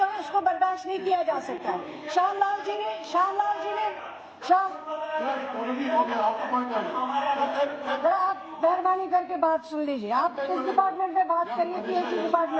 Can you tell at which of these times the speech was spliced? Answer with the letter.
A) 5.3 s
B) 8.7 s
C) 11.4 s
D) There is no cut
D